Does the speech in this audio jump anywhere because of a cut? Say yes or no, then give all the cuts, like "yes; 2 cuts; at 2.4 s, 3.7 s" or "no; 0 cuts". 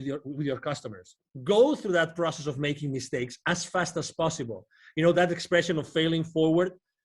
yes; 1 cut; at 1.3 s